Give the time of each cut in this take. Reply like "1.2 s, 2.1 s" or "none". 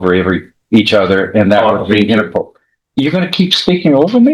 none